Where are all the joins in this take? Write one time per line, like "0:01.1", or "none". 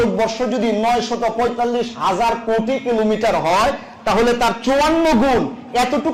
none